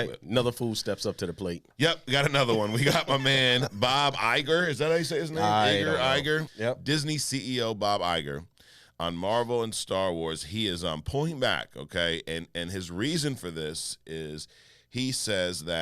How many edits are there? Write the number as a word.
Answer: one